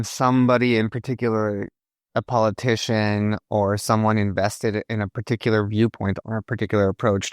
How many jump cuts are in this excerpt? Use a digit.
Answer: 1